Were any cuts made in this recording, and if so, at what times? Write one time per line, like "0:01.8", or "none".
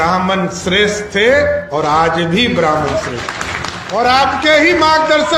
0:03.7